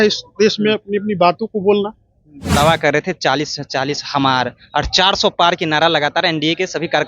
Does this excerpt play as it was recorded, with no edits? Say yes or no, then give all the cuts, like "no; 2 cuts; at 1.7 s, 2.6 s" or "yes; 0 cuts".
no; 1 cut; at 2.5 s